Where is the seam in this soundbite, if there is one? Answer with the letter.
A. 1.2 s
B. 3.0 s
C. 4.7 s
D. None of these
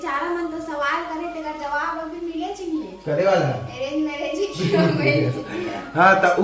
D